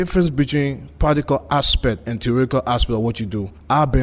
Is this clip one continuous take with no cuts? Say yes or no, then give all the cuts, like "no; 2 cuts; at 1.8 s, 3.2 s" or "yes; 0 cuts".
yes; 0 cuts